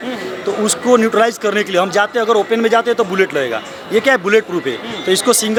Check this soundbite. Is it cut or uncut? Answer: uncut